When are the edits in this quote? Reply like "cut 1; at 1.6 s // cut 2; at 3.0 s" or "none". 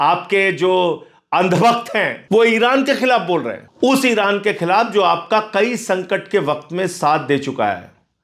cut 1; at 2.2 s // cut 2; at 3.6 s

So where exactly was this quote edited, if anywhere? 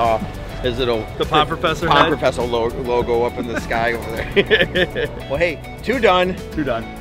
none

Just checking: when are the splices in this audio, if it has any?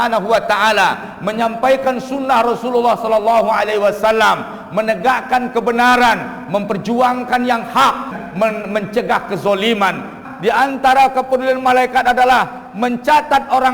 cut 1; at 8.1 s // cut 2; at 10.2 s

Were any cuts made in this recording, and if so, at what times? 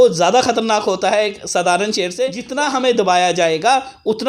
cut 1; at 2.4 s

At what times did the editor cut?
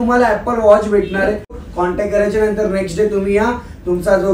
cut 1; at 1.6 s

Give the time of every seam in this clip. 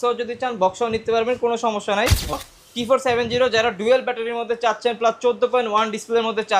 cut 1; at 2.3 s

